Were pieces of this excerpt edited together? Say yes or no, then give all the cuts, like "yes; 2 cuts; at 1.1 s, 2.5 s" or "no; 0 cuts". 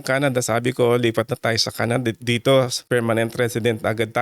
yes; 1 cut; at 2.8 s